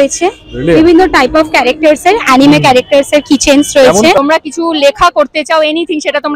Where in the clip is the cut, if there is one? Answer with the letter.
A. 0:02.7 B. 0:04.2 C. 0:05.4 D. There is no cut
B